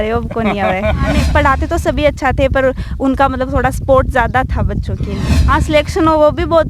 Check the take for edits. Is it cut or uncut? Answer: cut